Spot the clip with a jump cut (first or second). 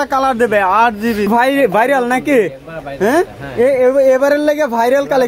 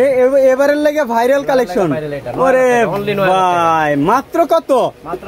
first